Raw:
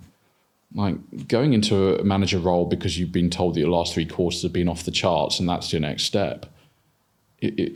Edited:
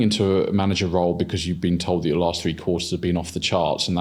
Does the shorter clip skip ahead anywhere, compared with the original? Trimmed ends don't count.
no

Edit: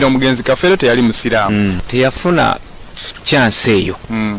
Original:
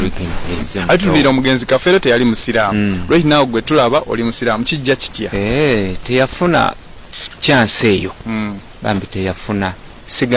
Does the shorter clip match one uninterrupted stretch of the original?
no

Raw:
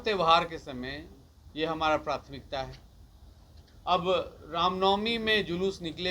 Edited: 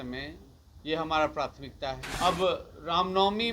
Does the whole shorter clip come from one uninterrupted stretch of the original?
no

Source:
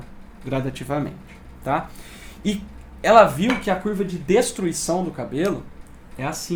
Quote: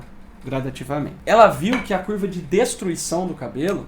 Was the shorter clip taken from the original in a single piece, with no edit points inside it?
no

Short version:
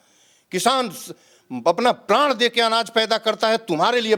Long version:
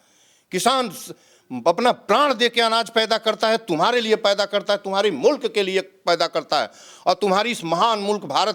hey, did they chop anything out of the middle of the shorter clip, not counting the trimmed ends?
no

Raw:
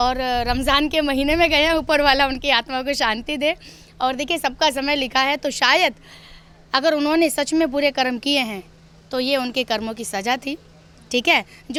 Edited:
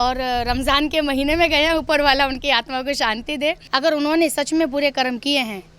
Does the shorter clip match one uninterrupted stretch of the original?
no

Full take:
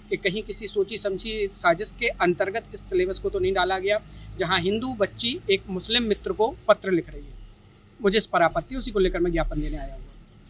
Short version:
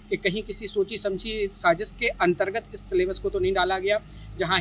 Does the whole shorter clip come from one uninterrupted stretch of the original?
yes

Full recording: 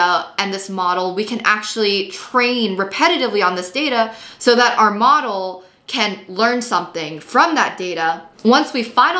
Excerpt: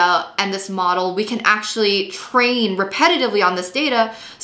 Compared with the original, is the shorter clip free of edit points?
yes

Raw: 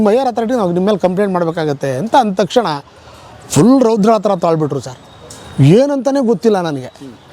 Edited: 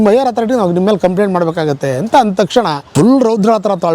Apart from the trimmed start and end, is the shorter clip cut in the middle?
yes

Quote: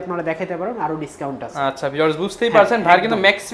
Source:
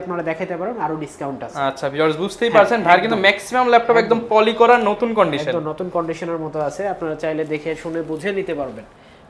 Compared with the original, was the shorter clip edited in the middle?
no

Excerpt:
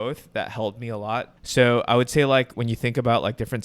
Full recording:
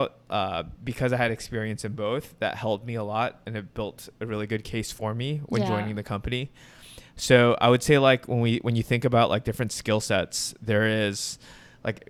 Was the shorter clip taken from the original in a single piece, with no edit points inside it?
no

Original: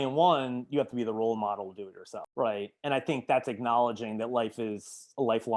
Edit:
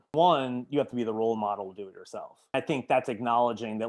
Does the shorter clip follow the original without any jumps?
no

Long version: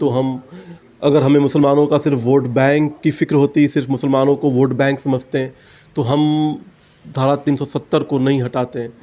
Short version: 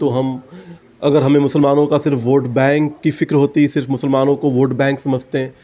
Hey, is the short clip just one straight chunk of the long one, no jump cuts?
yes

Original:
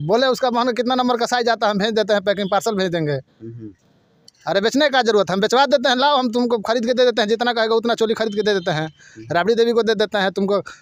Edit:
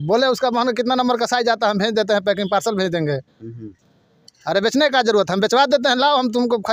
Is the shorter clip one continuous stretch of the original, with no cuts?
yes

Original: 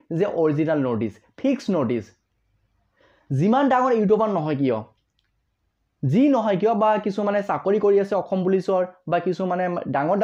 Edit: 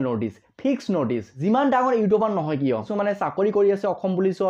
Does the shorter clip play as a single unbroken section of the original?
no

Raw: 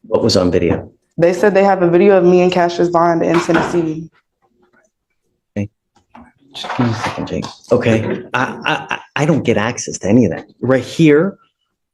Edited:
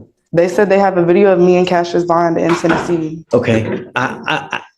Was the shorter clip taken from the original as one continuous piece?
no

